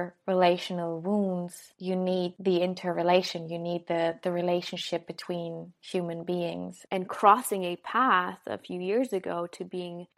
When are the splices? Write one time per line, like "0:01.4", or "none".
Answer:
0:06.8